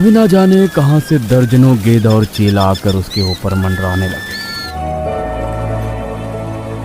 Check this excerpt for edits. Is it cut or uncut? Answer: cut